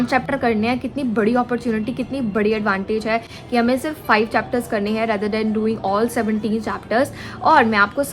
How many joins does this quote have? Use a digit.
0